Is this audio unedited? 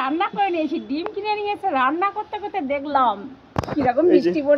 no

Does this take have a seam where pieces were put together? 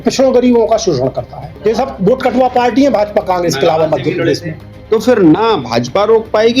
yes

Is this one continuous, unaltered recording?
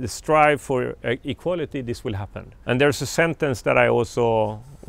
yes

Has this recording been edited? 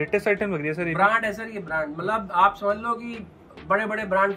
no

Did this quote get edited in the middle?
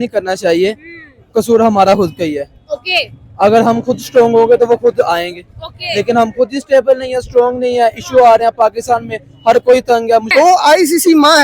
yes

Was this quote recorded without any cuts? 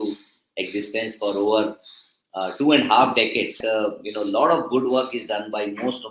no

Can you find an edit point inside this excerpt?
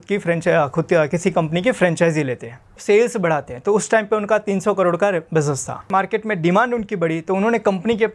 yes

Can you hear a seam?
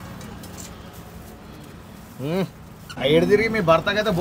yes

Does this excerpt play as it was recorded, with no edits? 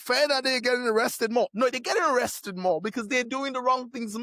yes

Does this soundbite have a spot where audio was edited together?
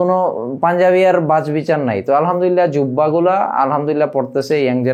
no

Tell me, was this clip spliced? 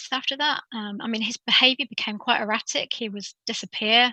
no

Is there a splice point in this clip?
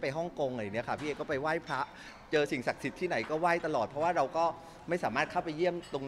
no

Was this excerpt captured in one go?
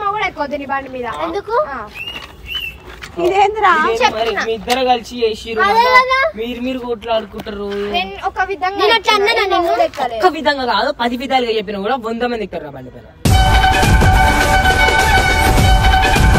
yes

